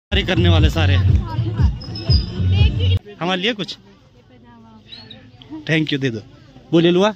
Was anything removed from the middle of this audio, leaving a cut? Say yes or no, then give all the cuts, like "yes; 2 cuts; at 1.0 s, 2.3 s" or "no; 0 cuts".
yes; 1 cut; at 3.0 s